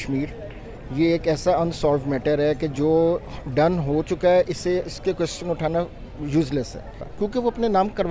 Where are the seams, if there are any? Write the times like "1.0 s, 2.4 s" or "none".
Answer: 7.0 s